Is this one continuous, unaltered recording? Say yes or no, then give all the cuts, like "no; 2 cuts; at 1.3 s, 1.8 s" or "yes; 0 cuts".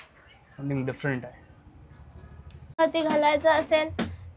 no; 1 cut; at 2.8 s